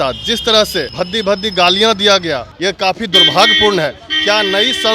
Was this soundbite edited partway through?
yes; 2 cuts; at 0.9 s, 2.5 s

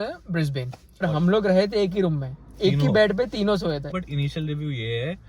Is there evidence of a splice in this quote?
yes; 2 cuts; at 1.0 s, 3.9 s

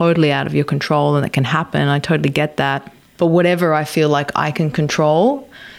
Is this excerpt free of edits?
no; 1 cut; at 3.0 s

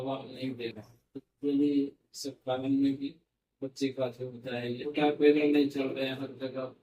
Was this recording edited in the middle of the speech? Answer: yes; 1 cut; at 4.9 s

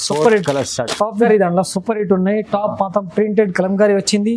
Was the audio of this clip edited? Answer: yes; 1 cut; at 1.2 s

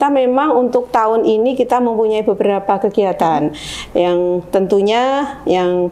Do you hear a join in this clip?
no; 0 cuts

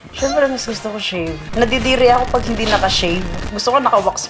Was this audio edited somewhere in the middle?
yes; 2 cuts; at 1.4 s, 3.4 s

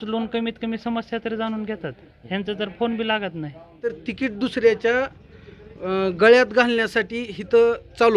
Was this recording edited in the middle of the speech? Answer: yes; 1 cut; at 4.0 s

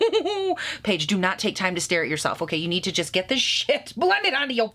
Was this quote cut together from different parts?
no; 0 cuts

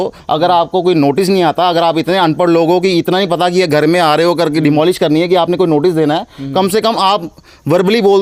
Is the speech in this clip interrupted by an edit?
no; 0 cuts

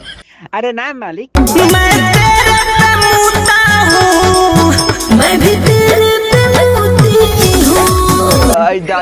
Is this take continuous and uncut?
no; 1 cut; at 1.3 s

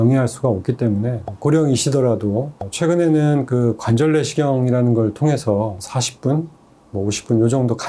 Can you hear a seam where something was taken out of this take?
yes; 1 cut; at 2.6 s

